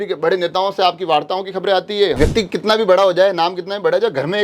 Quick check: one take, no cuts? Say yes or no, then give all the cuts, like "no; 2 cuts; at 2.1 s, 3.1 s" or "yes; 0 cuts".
no; 1 cut; at 2.2 s